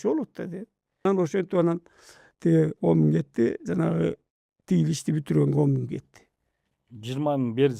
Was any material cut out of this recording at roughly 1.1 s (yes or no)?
yes